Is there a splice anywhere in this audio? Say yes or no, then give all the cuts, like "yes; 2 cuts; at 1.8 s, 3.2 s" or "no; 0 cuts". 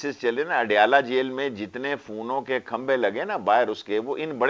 no; 0 cuts